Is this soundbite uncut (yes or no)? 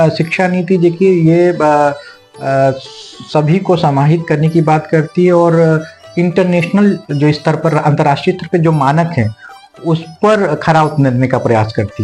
yes